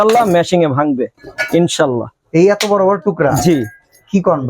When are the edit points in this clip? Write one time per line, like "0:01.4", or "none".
none